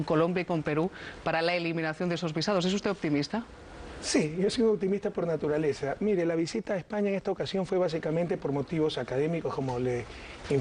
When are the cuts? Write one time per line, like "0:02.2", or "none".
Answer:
0:04.6